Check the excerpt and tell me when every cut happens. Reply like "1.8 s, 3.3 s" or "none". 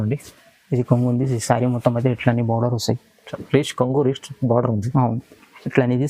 none